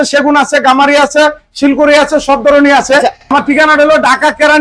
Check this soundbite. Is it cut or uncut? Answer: cut